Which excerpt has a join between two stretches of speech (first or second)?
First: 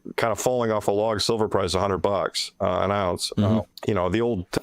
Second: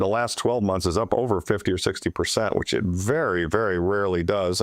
first